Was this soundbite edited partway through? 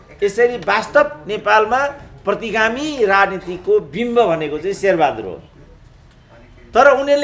no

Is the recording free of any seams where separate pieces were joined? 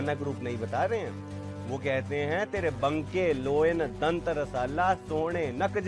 yes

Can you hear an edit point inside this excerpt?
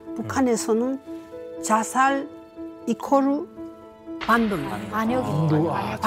no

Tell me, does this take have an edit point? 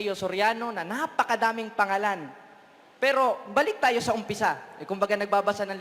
no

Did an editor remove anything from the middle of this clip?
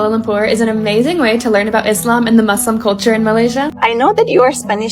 yes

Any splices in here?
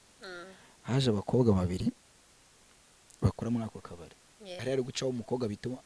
yes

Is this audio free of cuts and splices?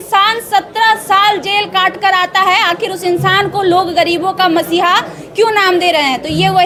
yes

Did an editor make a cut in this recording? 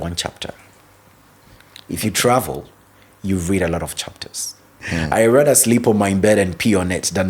yes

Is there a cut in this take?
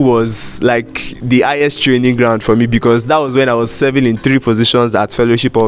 no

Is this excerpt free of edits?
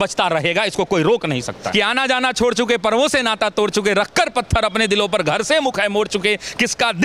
no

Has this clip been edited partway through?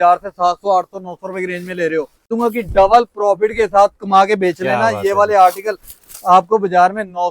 yes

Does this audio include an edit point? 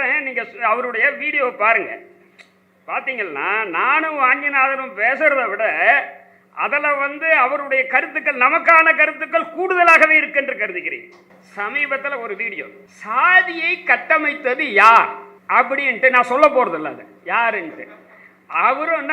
no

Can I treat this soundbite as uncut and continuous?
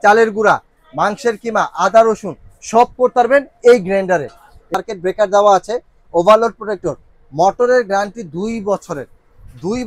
no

